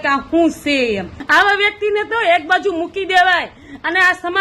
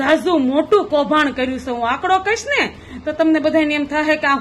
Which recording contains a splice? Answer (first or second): first